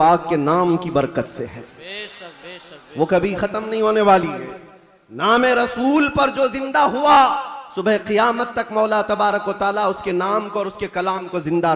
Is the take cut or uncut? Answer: uncut